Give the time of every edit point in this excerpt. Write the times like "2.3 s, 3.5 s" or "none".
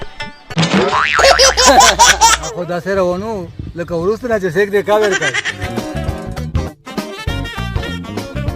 2.4 s, 5.6 s